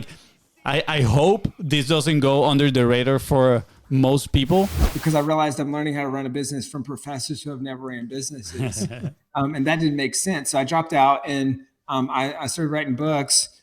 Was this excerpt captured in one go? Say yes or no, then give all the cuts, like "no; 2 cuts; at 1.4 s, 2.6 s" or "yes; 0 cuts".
no; 1 cut; at 4.9 s